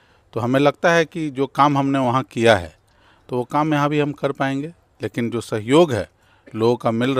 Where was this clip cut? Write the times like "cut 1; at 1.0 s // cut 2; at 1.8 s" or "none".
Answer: none